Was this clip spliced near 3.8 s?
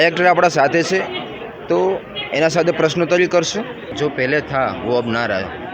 yes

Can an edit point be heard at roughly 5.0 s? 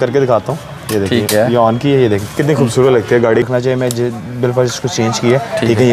no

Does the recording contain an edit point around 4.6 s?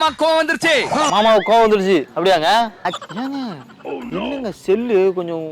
no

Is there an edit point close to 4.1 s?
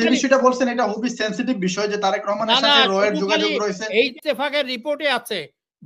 yes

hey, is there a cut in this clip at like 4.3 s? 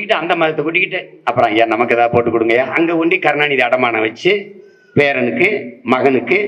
no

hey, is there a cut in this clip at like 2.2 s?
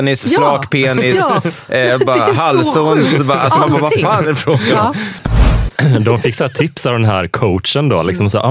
no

